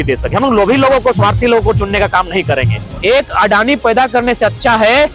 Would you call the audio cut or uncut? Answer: cut